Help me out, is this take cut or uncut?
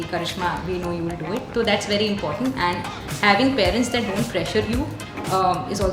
uncut